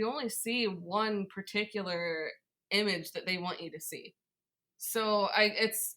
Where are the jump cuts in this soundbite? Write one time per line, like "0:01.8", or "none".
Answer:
0:04.8